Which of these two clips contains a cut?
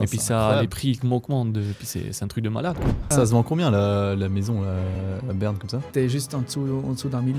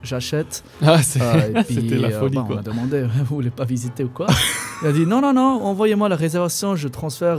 first; 2 cuts; at 3.1 s, 5.9 s

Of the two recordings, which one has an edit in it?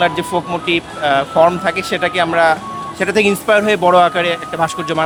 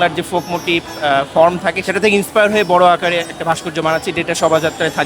second; 1 cut; at 1.8 s

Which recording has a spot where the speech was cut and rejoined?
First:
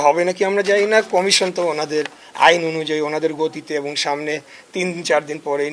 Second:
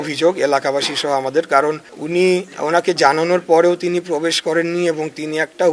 second; 1 cut; at 1.9 s

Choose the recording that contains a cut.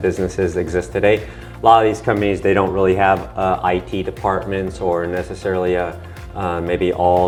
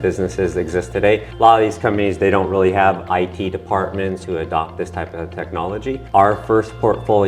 second; 4 cuts; at 1.3 s, 3.0 s, 4.2 s, 5.9 s

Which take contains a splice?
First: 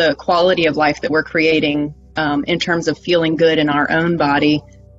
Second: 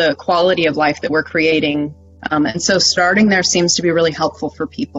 second; 1 cut; at 2.0 s

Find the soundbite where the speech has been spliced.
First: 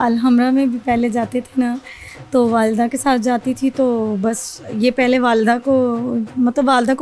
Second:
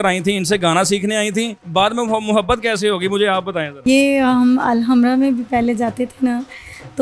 second; 2 cuts; at 1.6 s, 3.7 s

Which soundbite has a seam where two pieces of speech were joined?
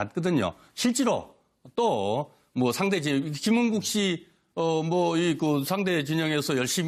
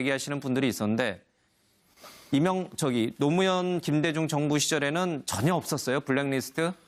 second; 1 cut; at 4.0 s

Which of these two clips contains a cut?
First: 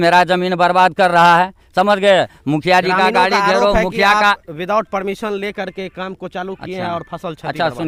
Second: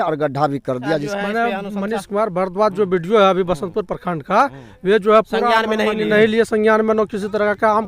second; 1 cut; at 1.1 s

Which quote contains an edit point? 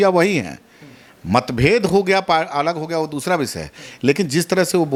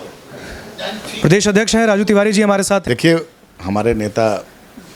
second; 1 cut; at 2.8 s

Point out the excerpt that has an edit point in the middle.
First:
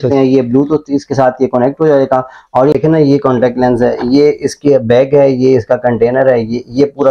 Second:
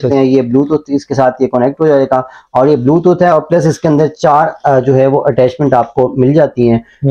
first; 1 cut; at 2.8 s

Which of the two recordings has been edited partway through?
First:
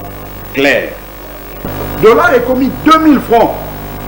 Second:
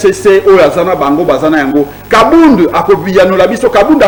first; 1 cut; at 1.7 s

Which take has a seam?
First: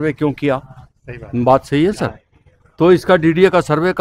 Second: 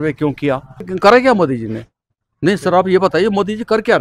second; 1 cut; at 0.9 s

